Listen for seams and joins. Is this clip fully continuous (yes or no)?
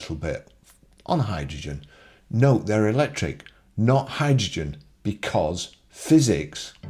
yes